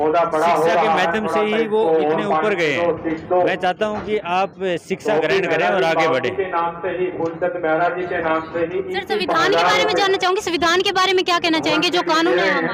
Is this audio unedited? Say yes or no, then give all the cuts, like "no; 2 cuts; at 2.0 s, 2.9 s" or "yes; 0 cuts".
yes; 0 cuts